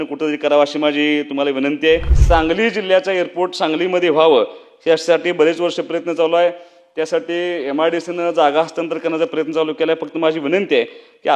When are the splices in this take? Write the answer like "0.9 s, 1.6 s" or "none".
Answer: 2.1 s